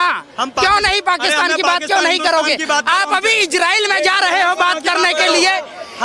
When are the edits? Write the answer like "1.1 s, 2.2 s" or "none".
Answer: none